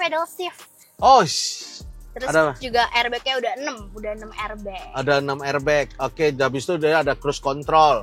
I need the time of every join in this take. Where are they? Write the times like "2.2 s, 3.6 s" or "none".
2.6 s